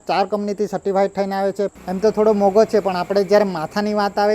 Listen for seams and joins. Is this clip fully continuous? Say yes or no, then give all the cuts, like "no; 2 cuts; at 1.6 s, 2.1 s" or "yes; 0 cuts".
no; 1 cut; at 1.7 s